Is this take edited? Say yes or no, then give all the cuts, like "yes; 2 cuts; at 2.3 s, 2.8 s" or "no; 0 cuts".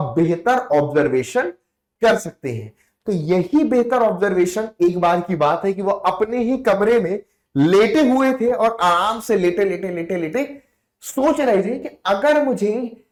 no; 0 cuts